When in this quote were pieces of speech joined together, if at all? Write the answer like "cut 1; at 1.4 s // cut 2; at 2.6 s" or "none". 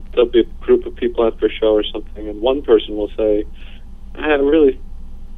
none